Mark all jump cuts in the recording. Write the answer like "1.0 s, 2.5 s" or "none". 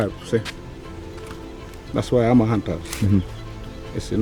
none